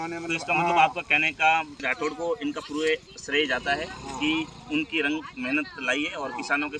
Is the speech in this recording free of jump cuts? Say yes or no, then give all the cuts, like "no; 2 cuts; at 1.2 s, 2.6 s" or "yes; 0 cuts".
no; 1 cut; at 1.8 s